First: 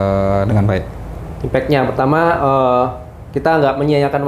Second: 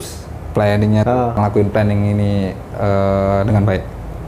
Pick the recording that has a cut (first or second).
second